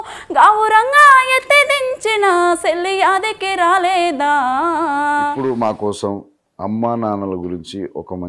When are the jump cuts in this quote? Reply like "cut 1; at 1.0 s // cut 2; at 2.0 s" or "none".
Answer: cut 1; at 5.4 s